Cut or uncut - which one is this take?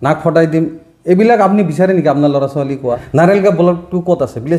cut